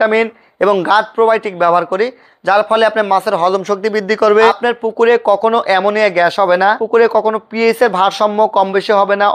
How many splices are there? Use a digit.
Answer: 2